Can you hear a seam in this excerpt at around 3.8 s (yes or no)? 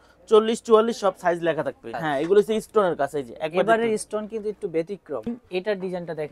no